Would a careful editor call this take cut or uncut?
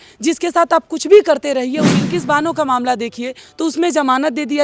cut